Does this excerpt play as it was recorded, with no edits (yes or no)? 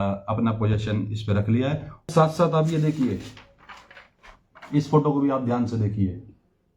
no